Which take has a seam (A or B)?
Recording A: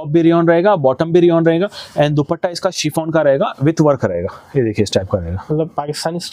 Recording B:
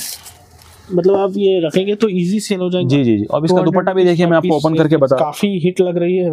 B